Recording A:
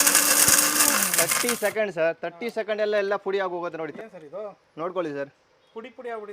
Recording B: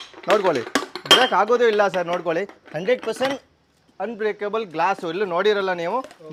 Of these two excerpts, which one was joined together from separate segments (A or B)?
A